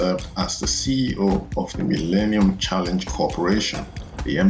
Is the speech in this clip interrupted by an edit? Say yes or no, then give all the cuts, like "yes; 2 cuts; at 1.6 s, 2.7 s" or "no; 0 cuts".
no; 0 cuts